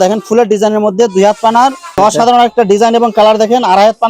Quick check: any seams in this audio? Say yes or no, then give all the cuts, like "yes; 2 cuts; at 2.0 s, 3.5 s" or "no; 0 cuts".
yes; 1 cut; at 1.8 s